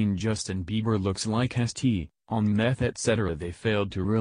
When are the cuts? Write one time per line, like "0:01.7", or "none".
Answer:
0:01.9